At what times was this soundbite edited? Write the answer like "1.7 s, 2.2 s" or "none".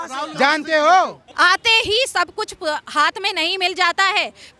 1.2 s